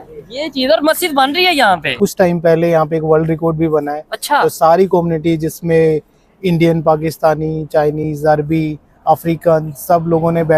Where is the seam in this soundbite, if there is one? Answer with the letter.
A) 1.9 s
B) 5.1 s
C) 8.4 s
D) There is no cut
A